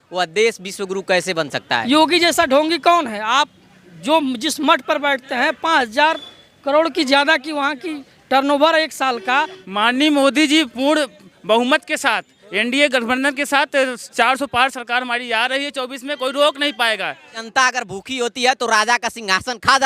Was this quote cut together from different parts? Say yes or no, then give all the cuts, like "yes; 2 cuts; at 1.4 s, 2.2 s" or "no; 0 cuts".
yes; 3 cuts; at 1.7 s, 9.6 s, 17.4 s